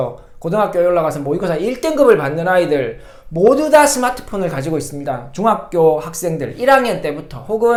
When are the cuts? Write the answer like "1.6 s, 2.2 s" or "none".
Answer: none